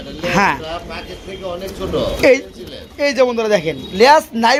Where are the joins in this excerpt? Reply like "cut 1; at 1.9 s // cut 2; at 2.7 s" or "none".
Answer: none